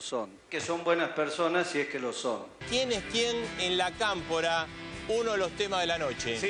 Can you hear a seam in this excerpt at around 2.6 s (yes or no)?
no